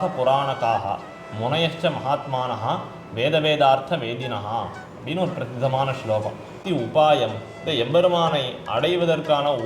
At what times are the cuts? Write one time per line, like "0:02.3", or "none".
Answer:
0:06.6